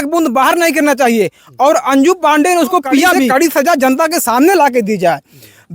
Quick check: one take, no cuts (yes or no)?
no